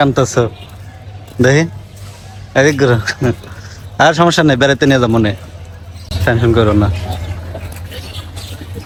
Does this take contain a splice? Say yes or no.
no